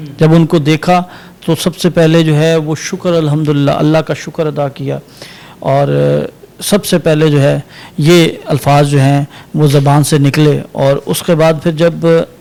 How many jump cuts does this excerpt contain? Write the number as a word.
zero